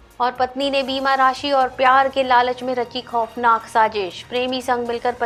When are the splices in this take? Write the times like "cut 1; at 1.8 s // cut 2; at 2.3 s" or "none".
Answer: none